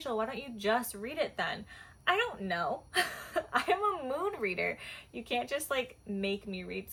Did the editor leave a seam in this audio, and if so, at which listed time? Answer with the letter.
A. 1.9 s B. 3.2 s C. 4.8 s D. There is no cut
D